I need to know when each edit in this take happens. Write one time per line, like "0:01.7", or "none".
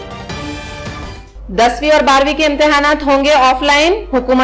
0:01.2

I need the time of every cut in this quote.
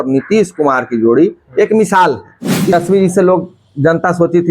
0:02.7

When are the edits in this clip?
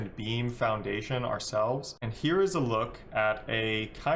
0:01.9

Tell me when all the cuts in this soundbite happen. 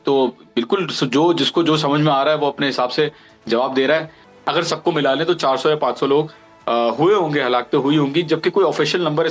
0:04.2

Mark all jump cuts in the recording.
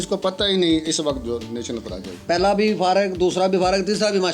0:02.2

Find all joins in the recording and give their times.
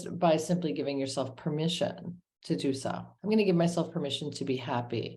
0:03.1

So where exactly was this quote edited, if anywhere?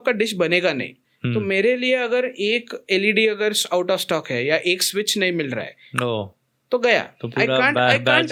none

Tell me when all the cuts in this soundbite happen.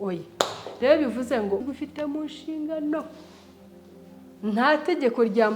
0:01.6

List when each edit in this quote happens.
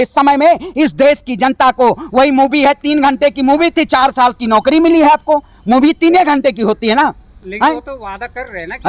none

